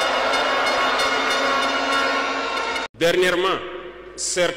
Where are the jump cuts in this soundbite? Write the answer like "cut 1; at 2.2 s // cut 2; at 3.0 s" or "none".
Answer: cut 1; at 2.8 s